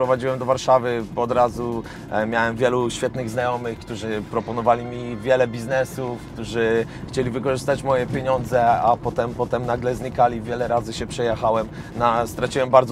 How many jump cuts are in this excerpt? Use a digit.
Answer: 0